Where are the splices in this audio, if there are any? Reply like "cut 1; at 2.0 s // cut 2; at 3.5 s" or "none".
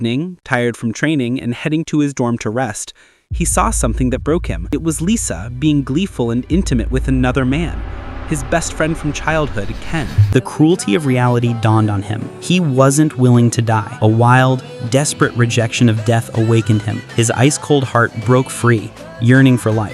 cut 1; at 10.1 s